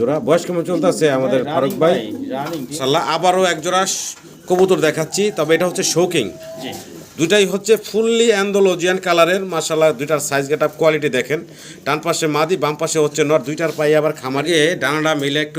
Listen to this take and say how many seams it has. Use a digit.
2